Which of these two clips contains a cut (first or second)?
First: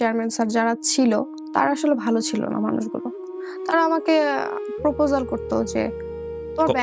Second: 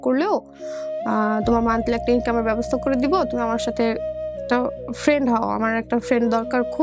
first